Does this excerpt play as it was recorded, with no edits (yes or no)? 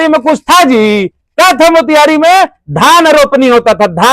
yes